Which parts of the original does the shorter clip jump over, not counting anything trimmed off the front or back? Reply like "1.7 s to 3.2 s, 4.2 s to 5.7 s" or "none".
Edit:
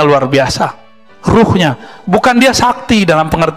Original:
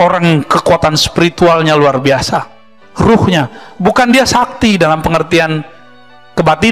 none